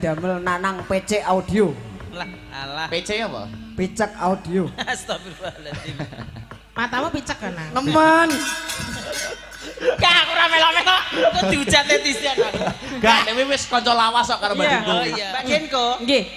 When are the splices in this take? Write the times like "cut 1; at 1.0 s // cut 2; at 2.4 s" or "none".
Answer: cut 1; at 15.3 s